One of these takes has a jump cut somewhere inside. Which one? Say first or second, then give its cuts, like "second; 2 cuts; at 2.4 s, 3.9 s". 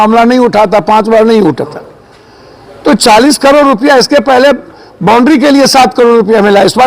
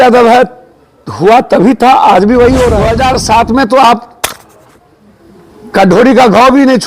second; 1 cut; at 2.9 s